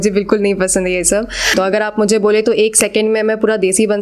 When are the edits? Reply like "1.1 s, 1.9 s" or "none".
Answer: 1.5 s